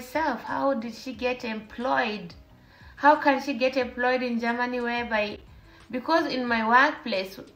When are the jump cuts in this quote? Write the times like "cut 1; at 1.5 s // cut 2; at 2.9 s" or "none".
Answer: none